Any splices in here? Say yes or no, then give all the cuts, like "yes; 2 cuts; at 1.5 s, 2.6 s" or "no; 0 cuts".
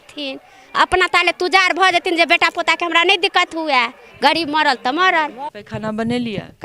yes; 1 cut; at 5.5 s